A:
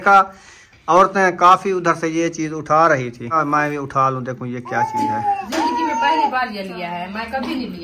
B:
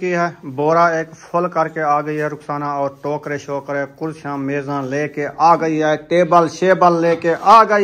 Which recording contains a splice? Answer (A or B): A